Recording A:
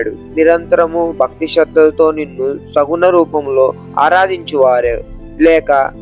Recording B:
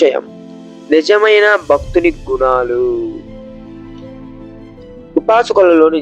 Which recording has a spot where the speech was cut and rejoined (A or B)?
B